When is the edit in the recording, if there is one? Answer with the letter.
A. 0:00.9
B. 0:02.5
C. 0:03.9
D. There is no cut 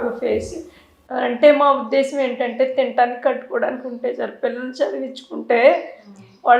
D